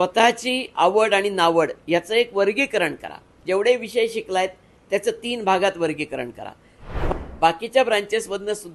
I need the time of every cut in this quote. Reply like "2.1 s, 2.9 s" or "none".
7.0 s